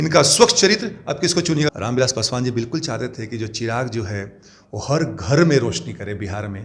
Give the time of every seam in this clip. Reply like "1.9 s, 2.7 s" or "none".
1.7 s